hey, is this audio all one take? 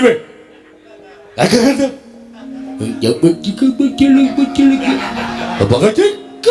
no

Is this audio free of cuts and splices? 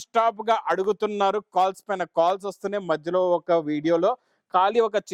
yes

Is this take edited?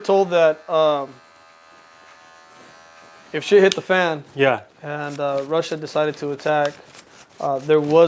no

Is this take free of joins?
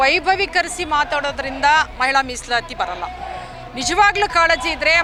yes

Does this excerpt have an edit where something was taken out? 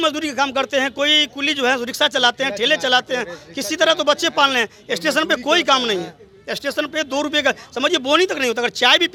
no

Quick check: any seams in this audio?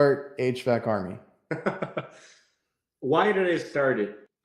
no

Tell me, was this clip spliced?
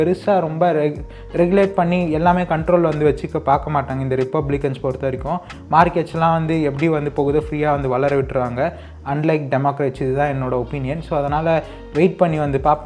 no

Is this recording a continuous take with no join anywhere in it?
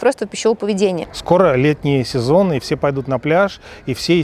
no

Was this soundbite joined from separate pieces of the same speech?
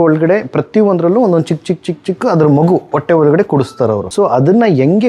yes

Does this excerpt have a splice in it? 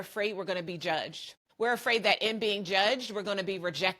yes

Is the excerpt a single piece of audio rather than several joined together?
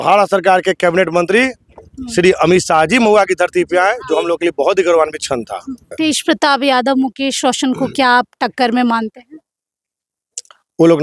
no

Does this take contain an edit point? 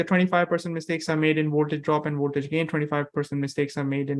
no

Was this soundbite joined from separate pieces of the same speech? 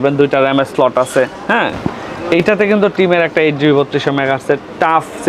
no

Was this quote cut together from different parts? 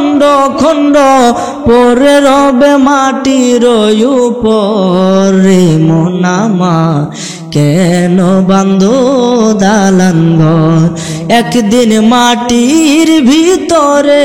no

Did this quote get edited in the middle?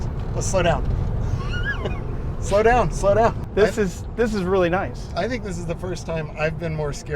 yes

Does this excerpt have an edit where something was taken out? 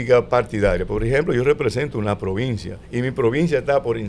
no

